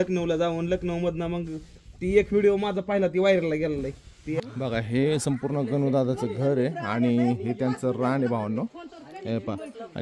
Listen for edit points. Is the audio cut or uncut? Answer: cut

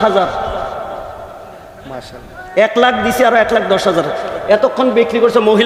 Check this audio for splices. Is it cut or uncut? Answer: uncut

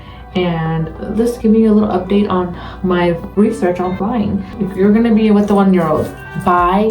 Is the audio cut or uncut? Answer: cut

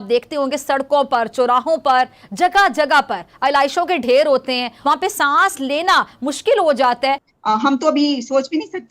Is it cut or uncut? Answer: cut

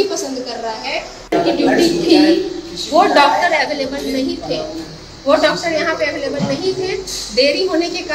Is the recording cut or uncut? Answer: cut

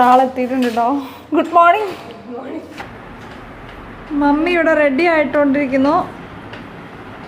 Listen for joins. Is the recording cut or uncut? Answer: cut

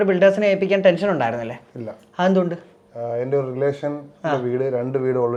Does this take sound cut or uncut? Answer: uncut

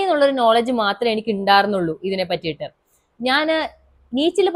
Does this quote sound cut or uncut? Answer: uncut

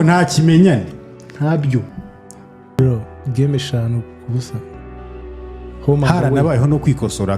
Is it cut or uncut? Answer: cut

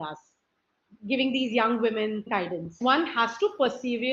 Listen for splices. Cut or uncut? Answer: cut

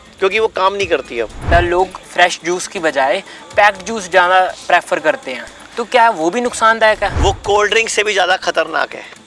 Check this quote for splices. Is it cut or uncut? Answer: cut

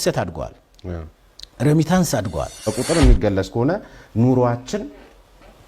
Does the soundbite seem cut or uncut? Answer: cut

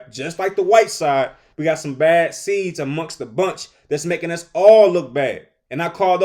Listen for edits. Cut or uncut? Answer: uncut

